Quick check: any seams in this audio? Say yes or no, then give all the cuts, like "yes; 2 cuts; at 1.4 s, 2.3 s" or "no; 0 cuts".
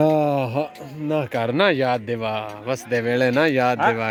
no; 0 cuts